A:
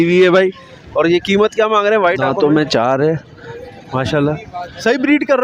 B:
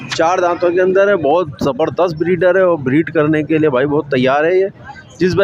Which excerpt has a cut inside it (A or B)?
A